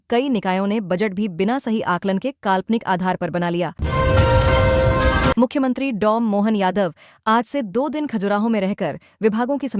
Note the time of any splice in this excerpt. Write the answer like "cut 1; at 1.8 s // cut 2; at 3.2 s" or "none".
cut 1; at 3.8 s // cut 2; at 5.3 s